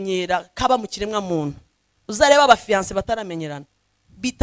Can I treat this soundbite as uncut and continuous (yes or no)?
yes